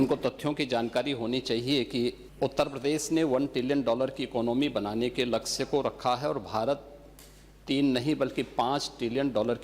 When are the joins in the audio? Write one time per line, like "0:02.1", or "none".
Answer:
0:02.2